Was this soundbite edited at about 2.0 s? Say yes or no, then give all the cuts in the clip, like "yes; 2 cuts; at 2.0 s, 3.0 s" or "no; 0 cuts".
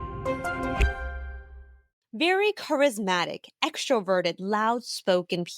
yes; 1 cut; at 2.0 s